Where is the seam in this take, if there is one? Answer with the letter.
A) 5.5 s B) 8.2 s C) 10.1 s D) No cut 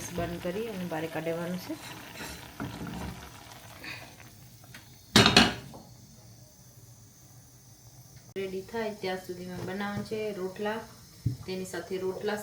B